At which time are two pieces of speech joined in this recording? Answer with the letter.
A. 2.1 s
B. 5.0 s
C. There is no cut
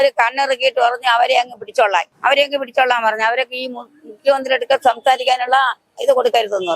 A